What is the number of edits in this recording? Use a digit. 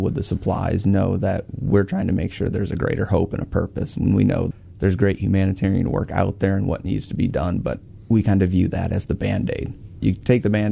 0